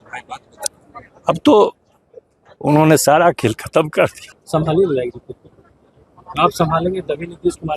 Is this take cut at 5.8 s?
no; 1 cut; at 4.3 s

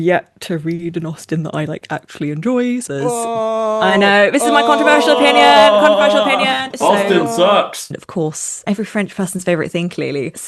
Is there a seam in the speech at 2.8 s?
yes; 3 cuts; at 2.8 s, 6.7 s, 7.9 s

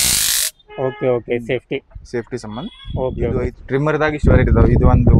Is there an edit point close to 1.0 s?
no; 1 cut; at 3.5 s

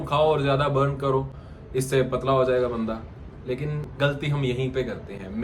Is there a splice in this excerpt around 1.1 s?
no; 0 cuts

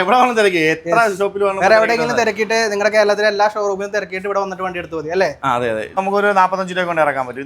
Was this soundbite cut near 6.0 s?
yes; 1 cut; at 6.0 s

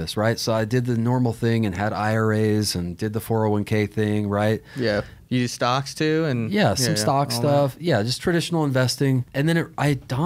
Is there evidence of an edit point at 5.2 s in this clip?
yes; 2 cuts; at 5.2 s, 9.3 s

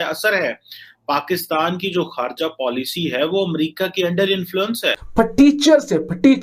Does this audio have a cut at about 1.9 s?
no; 1 cut; at 4.9 s

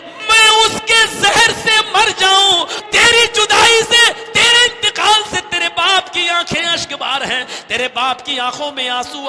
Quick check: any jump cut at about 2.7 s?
yes; 1 cut; at 2.7 s

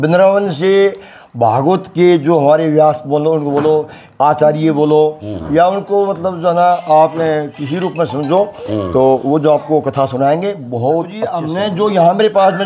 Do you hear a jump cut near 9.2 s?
no; 1 cut; at 11.4 s

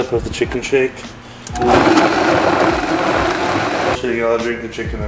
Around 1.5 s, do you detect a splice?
no; 1 cut; at 4.0 s

